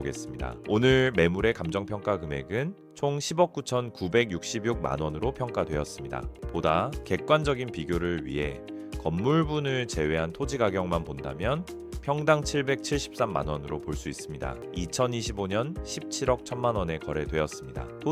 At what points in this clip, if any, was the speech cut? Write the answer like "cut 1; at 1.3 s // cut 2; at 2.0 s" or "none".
cut 1; at 6.3 s // cut 2; at 14.7 s